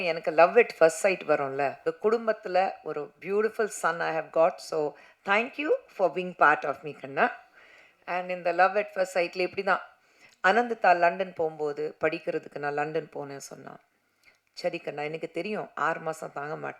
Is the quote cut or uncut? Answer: cut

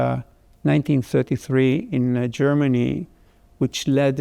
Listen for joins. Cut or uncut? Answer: uncut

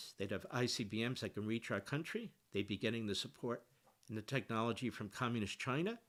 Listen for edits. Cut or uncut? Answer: uncut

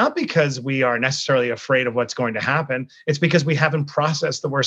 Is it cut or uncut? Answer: uncut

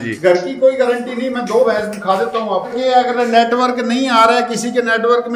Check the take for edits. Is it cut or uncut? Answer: cut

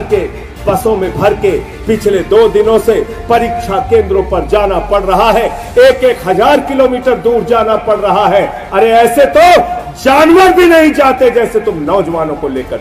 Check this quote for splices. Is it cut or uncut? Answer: uncut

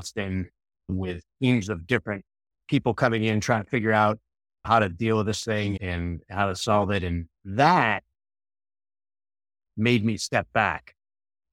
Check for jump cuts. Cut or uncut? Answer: uncut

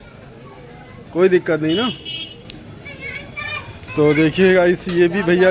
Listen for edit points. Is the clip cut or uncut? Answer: uncut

